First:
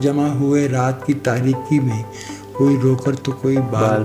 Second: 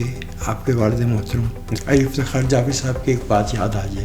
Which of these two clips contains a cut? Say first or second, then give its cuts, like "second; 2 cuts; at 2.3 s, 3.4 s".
second; 1 cut; at 1.6 s